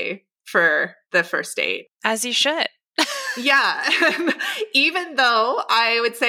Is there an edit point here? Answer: yes; 1 cut; at 1.0 s

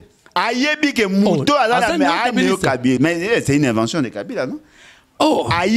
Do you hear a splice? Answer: no; 0 cuts

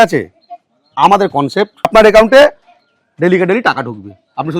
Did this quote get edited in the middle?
yes; 1 cut; at 1.9 s

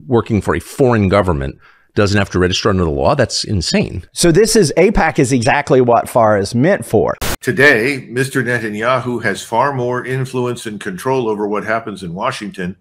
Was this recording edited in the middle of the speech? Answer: yes; 1 cut; at 7.2 s

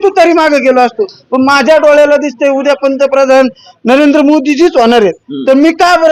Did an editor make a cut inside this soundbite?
no; 0 cuts

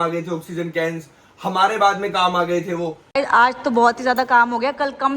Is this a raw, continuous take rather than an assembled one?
no; 1 cut; at 3.0 s

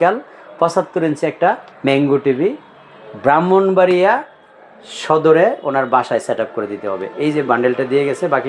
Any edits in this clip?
yes; 1 cut; at 1.7 s

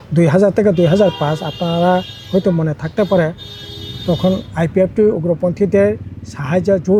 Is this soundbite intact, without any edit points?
yes; 0 cuts

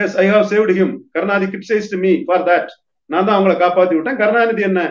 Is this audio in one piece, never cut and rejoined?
yes; 0 cuts

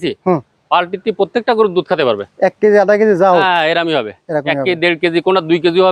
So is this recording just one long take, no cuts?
yes; 0 cuts

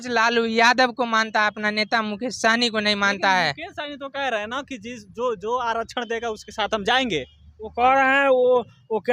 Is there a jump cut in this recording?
no; 0 cuts

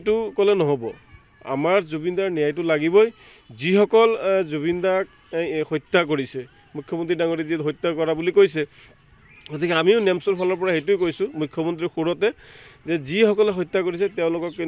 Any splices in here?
no; 0 cuts

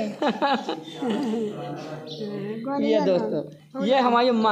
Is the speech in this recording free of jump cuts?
yes; 0 cuts

